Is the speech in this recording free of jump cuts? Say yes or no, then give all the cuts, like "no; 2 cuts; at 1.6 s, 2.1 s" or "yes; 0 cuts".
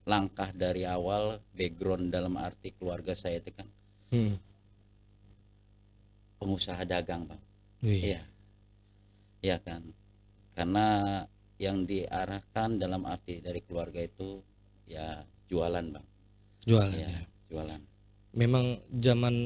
yes; 0 cuts